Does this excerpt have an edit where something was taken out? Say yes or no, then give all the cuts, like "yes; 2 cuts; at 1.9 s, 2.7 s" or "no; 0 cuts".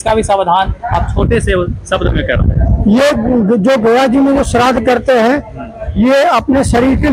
no; 0 cuts